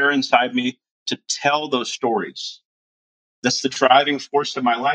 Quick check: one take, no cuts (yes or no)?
no